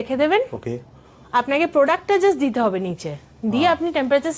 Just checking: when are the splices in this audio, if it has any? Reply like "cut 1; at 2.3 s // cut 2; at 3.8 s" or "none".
none